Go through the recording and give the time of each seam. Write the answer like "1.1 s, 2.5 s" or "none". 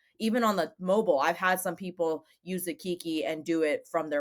none